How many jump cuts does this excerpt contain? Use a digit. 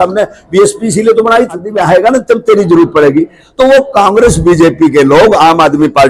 1